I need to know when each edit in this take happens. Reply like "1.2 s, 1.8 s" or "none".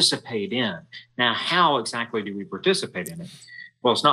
none

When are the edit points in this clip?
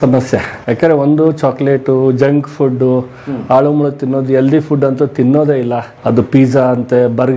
none

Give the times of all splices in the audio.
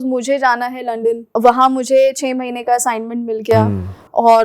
1.3 s

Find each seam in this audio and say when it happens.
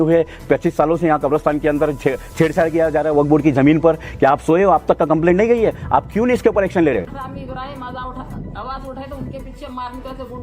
7.1 s

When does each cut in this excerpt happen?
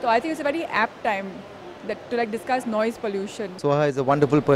3.6 s

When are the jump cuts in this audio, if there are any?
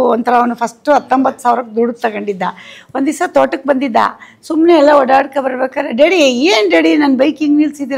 none

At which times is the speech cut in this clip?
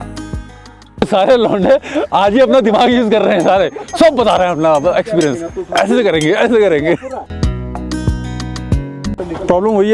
1.0 s, 7.3 s, 9.0 s

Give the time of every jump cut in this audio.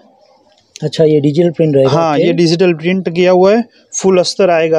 none

